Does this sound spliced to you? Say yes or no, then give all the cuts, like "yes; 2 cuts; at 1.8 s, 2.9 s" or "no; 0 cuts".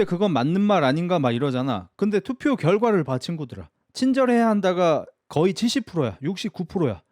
no; 0 cuts